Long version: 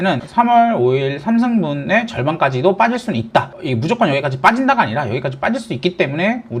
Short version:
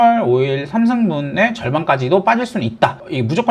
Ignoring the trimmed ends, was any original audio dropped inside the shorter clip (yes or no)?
no